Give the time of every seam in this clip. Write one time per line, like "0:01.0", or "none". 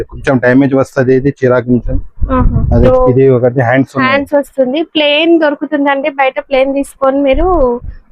0:02.9